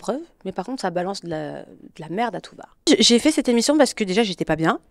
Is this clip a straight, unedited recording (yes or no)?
no